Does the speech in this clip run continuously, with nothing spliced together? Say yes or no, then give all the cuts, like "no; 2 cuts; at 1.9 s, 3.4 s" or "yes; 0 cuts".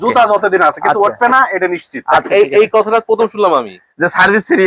yes; 0 cuts